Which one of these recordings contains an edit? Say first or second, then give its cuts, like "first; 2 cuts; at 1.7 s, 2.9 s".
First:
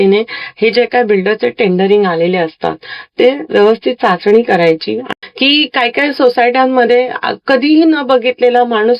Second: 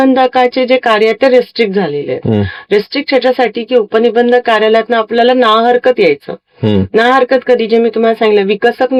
first; 1 cut; at 5.0 s